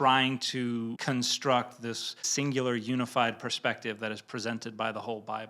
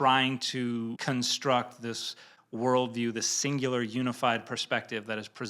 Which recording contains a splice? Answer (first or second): first